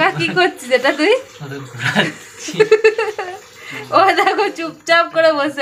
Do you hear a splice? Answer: no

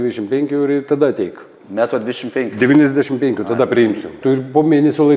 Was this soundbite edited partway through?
yes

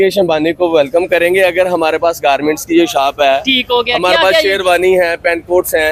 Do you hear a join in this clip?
no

